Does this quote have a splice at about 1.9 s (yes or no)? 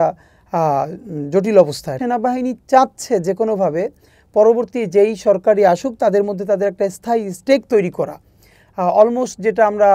yes